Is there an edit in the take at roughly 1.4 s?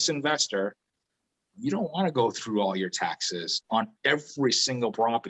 no; 1 cut; at 3.6 s

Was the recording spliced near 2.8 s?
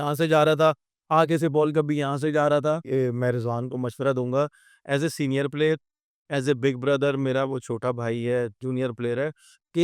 yes; 1 cut; at 2.8 s

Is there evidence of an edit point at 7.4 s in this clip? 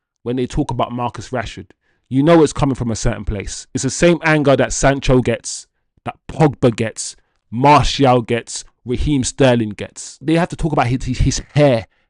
no; 1 cut; at 10.2 s

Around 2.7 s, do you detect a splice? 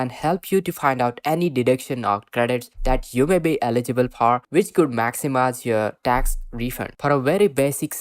no; 1 cut; at 6.9 s

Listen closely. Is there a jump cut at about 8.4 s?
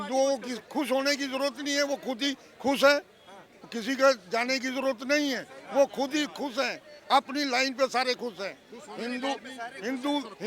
no; 0 cuts

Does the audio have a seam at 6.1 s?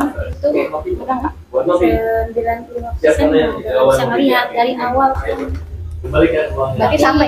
no; 0 cuts

